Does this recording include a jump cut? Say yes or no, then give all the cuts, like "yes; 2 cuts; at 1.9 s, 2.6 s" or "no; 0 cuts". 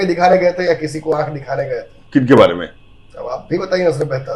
no; 0 cuts